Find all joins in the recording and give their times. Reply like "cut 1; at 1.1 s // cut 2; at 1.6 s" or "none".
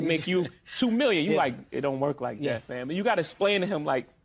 none